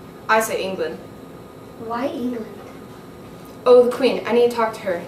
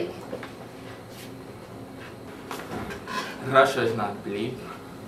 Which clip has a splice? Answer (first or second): second